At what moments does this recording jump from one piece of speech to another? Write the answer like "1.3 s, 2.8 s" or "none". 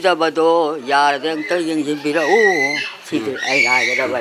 none